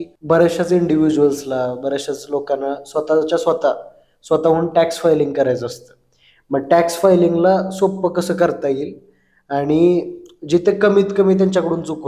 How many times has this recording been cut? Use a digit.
0